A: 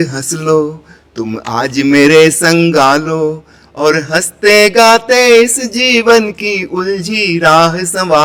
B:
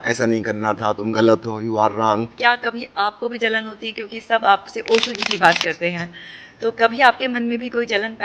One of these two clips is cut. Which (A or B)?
B